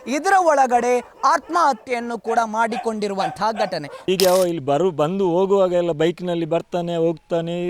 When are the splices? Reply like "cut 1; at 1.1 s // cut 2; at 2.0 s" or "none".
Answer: cut 1; at 4.0 s